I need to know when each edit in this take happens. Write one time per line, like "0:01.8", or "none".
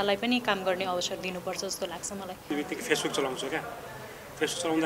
0:02.4